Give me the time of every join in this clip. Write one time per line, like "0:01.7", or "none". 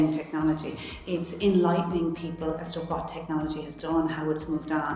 none